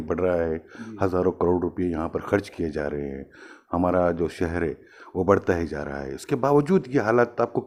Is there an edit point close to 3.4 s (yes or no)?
no